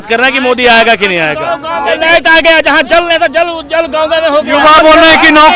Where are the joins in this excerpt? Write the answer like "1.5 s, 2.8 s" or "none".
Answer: none